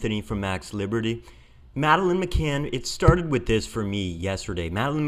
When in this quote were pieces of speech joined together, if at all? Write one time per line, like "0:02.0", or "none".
0:03.1